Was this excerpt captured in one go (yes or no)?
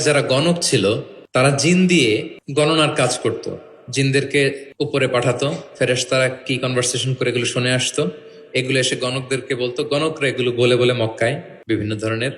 no